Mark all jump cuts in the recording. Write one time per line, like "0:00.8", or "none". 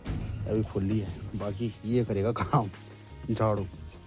none